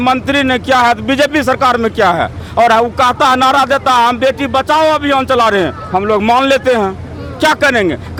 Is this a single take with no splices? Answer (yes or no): yes